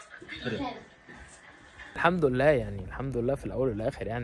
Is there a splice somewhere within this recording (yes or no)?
yes